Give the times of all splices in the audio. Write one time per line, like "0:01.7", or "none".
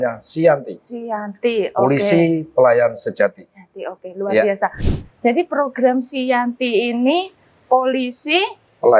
none